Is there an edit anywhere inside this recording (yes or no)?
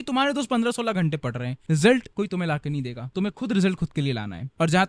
yes